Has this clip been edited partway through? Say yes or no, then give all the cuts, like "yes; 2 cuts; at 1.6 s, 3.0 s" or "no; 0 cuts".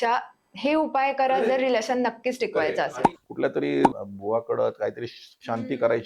yes; 1 cut; at 3.0 s